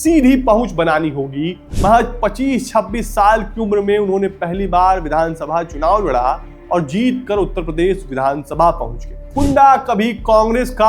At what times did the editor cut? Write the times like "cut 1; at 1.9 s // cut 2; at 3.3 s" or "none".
cut 1; at 1.6 s // cut 2; at 9.3 s